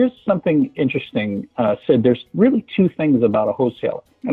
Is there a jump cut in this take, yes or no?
no